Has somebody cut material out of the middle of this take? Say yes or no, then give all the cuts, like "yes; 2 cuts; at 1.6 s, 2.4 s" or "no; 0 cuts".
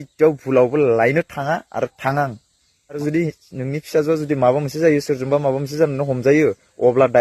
yes; 1 cut; at 3.0 s